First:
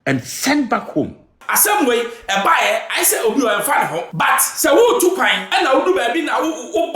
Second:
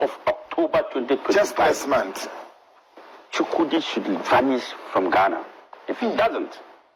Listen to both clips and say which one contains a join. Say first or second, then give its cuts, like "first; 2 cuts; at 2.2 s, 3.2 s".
first; 3 cuts; at 1.3 s, 4.1 s, 5.4 s